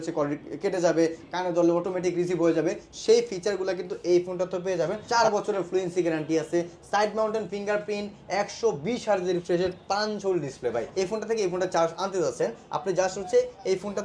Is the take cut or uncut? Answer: cut